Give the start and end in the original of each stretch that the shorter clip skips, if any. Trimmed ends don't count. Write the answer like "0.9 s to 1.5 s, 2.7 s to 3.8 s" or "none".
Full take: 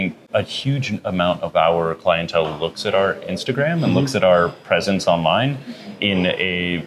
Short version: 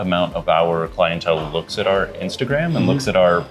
none